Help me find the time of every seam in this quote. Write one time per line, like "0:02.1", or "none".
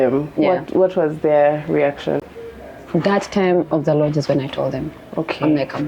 0:02.3